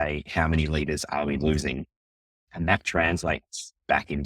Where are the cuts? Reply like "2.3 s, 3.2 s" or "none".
2.5 s